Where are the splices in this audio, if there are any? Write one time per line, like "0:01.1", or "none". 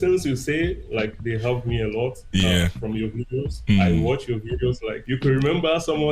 0:04.9